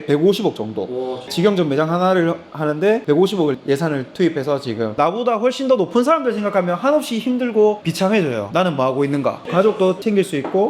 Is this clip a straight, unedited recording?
no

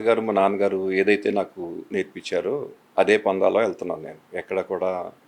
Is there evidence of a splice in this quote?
no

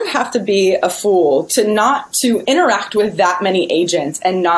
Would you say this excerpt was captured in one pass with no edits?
yes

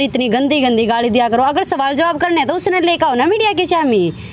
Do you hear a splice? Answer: no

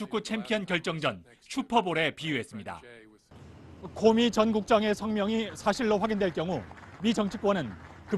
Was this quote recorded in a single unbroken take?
yes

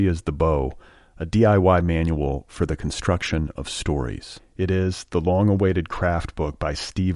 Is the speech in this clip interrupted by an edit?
no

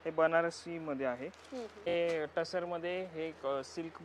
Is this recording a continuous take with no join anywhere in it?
no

